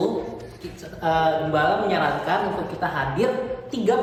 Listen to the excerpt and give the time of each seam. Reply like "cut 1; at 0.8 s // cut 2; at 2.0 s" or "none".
none